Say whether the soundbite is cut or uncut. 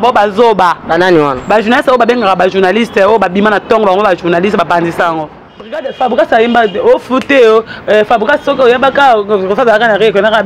cut